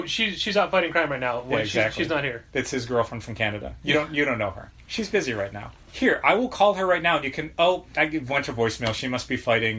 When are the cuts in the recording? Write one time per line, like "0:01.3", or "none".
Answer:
0:05.9